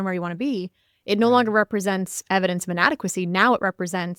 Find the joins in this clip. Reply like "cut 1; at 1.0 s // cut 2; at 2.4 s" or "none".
none